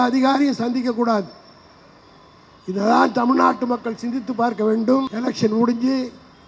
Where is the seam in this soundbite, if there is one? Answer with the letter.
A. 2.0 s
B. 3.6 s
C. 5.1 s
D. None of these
C